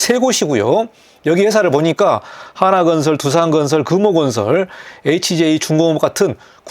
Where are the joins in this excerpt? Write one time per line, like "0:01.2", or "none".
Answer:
none